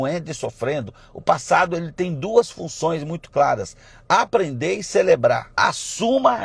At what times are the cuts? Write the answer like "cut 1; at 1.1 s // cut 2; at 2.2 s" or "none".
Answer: cut 1; at 5.5 s